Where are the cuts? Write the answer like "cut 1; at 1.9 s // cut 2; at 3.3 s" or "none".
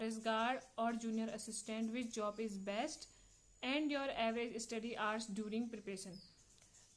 none